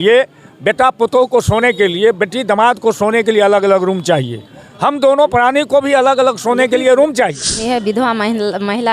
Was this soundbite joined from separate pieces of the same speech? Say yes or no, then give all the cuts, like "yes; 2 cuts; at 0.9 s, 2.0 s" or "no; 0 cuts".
yes; 1 cut; at 7.6 s